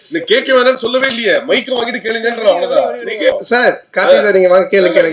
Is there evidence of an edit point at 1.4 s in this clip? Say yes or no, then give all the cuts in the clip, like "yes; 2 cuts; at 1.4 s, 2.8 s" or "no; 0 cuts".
no; 1 cut; at 3.4 s